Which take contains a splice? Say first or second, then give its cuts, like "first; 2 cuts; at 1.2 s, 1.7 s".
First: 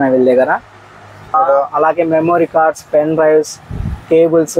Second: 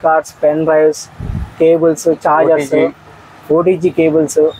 first; 1 cut; at 1.3 s